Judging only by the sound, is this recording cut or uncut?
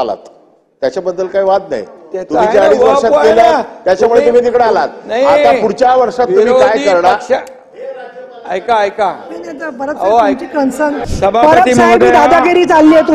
cut